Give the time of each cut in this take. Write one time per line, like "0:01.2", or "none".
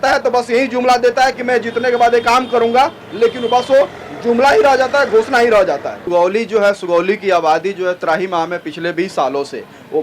0:06.0